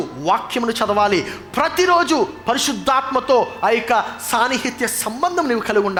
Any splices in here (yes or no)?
no